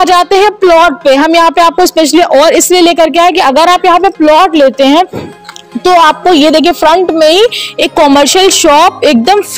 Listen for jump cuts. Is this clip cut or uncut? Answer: uncut